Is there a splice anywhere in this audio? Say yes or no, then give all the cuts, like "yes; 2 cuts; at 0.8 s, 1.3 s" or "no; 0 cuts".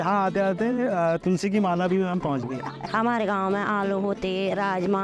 yes; 1 cut; at 2.8 s